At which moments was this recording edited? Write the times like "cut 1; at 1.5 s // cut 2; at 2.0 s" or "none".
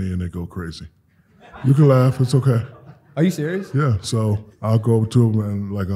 cut 1; at 4.5 s